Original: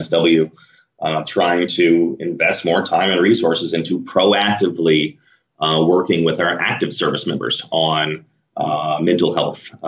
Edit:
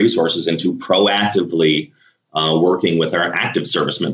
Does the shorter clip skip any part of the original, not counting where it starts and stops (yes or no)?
no